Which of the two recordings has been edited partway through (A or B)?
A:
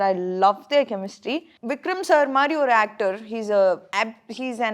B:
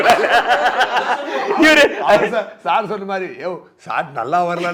A